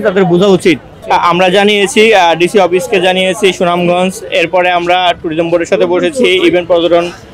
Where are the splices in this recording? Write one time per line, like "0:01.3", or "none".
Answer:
0:00.9